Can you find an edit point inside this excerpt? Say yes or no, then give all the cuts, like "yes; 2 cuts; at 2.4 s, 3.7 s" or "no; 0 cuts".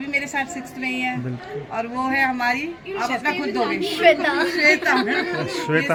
no; 0 cuts